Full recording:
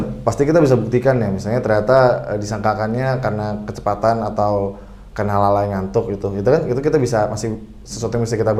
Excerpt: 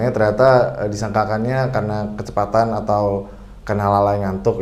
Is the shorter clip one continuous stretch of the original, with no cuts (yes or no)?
yes